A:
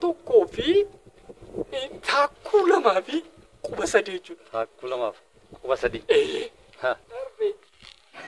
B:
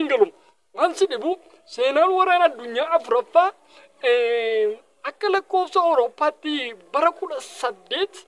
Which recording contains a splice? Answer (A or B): A